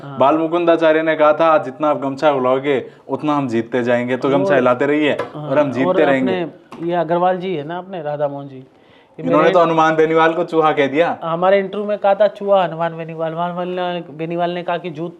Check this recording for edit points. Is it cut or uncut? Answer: uncut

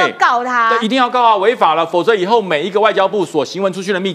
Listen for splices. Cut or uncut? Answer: uncut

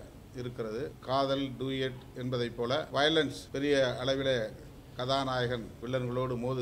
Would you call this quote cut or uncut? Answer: cut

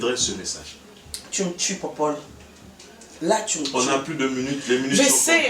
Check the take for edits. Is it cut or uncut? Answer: uncut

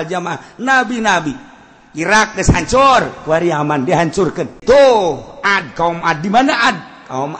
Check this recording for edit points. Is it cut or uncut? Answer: cut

